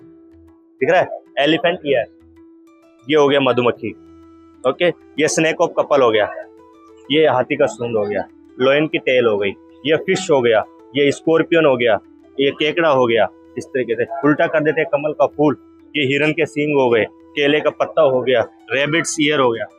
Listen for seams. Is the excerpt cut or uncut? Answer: uncut